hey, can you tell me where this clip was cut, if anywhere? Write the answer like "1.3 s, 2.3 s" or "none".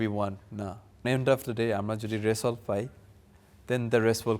1.0 s